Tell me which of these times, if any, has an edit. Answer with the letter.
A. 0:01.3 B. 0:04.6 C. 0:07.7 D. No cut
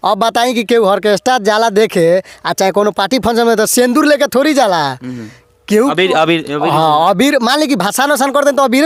D